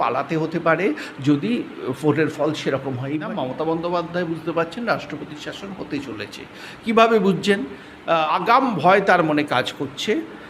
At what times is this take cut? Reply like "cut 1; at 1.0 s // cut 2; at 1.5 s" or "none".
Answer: cut 1; at 3.3 s // cut 2; at 8.3 s